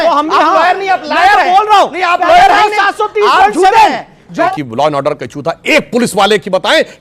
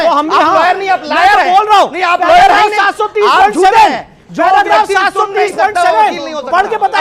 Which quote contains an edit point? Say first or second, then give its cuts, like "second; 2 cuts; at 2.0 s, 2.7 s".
first; 1 cut; at 4.5 s